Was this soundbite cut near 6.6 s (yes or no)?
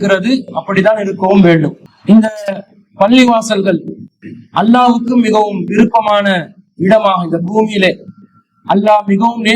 no